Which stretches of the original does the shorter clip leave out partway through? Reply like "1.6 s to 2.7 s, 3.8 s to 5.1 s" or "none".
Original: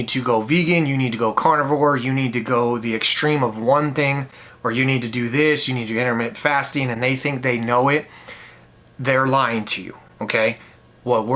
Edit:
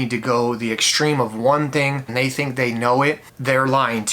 4.3 s to 6.9 s, 8.2 s to 8.9 s